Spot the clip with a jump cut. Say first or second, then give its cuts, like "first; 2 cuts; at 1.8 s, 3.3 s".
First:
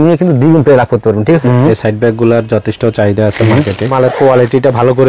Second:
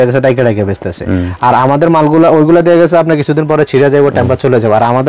first; 2 cuts; at 1.4 s, 3.9 s